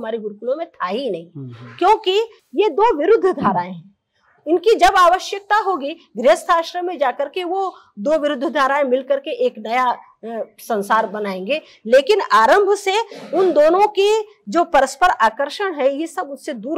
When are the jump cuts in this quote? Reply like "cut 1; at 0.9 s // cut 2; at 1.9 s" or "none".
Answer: none